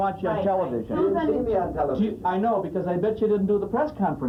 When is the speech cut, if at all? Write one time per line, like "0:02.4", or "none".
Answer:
none